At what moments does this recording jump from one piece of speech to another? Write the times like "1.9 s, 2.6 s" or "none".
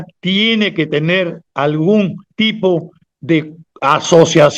1.4 s, 2.2 s, 3.6 s